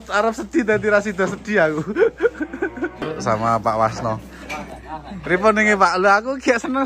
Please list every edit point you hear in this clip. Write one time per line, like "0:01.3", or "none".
0:03.0